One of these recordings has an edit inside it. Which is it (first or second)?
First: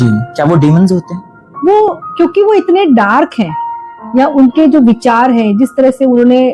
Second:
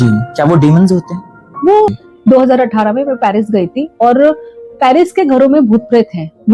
second